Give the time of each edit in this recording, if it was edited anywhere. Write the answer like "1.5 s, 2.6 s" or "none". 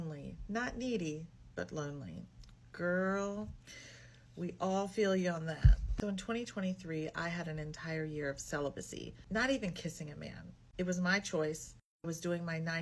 none